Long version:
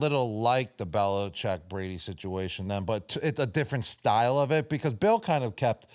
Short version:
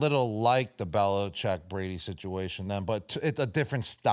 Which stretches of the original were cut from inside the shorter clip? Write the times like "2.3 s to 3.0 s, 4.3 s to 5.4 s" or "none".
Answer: none